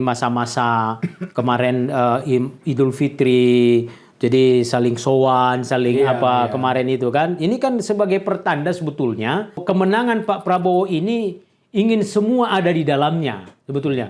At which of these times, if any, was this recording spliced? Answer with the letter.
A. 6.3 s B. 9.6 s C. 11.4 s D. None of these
B